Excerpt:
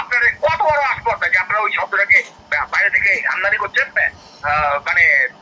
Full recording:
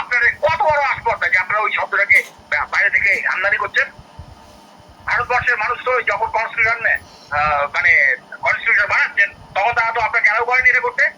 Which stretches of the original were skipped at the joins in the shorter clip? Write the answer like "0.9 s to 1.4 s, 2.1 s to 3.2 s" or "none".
3.9 s to 6.8 s